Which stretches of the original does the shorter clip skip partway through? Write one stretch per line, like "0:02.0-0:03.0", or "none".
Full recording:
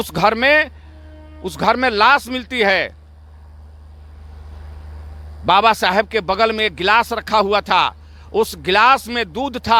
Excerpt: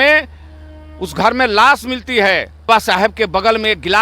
0:03.1-0:05.6